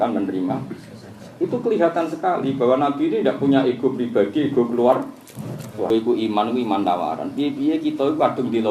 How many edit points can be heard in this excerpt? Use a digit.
1